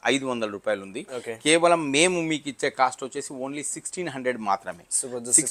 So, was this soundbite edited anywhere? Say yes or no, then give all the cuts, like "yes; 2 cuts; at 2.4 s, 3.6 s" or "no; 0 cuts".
no; 0 cuts